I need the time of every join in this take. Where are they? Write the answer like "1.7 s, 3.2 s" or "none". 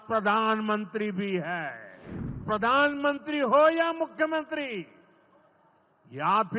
2.4 s